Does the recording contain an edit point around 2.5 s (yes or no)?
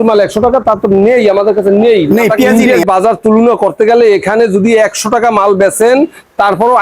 yes